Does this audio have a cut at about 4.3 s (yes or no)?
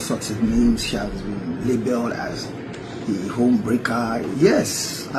yes